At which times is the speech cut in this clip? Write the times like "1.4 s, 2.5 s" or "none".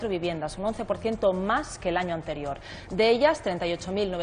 1.1 s